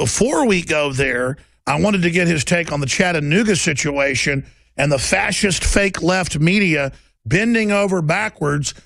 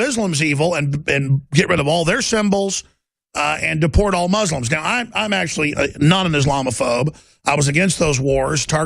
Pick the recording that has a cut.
second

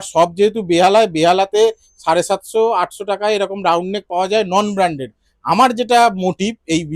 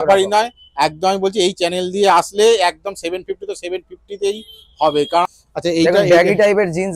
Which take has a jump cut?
second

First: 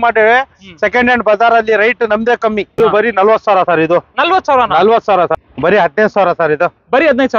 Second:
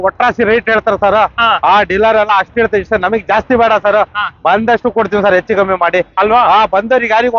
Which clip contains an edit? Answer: first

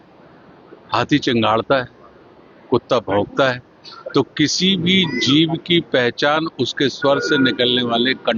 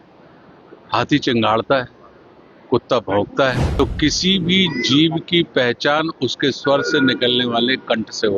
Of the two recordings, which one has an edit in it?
second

